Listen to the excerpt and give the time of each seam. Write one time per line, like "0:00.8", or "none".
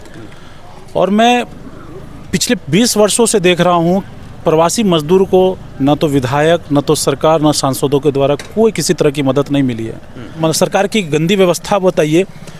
0:10.2